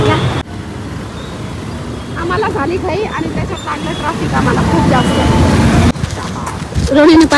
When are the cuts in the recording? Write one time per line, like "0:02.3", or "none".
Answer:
0:05.9